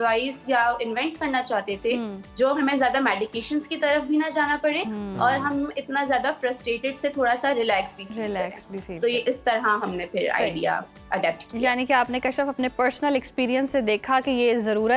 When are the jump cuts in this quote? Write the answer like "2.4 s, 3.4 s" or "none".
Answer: none

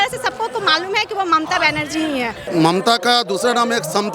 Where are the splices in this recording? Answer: 2.4 s

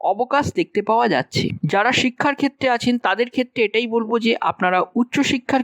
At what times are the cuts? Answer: 1.6 s

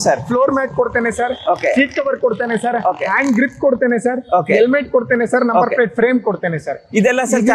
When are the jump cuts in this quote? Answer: none

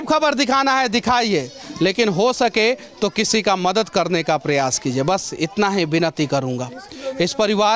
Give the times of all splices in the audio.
none

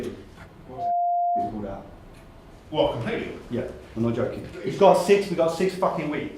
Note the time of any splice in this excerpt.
3.4 s, 4.5 s

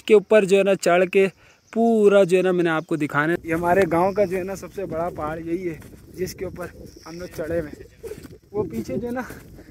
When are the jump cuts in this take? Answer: 3.4 s

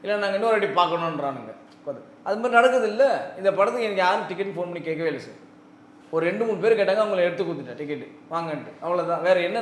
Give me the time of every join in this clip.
none

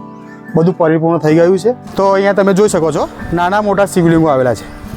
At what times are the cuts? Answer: 1.9 s, 3.2 s

